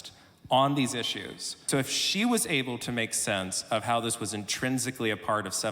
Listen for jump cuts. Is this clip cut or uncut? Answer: cut